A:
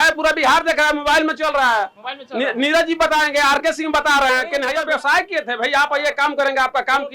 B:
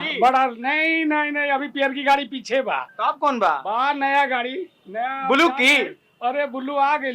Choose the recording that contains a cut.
A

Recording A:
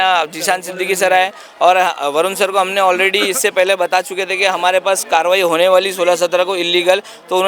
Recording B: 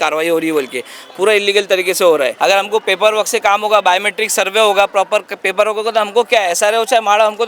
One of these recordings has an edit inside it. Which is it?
B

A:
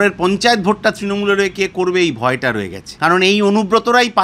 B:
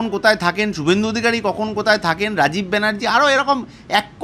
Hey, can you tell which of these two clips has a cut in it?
A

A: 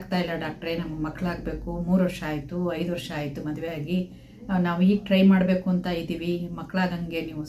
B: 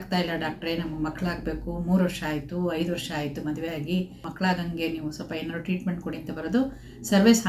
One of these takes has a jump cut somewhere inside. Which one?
B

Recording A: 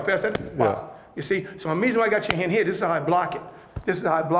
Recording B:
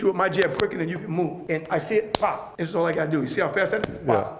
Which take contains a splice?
B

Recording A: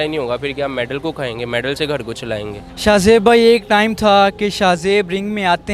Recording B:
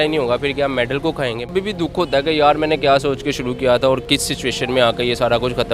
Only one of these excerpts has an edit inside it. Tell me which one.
B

